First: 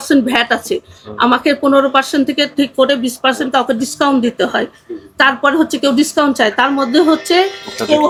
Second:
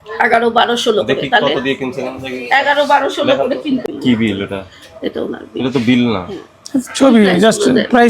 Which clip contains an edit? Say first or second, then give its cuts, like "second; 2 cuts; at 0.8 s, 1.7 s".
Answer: second; 1 cut; at 3.8 s